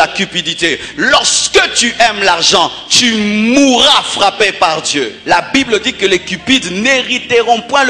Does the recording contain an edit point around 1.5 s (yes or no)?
no